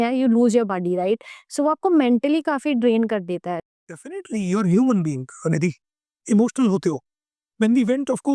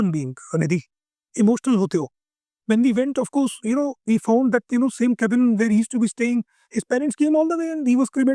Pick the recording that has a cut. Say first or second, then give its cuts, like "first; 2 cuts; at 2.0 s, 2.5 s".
first; 1 cut; at 3.6 s